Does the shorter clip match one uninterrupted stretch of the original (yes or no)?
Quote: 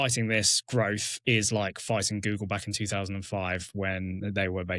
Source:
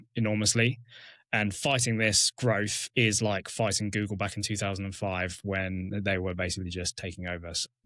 yes